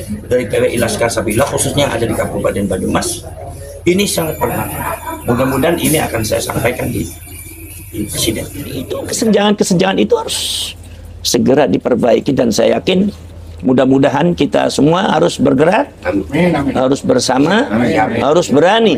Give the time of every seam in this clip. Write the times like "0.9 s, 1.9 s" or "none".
9.0 s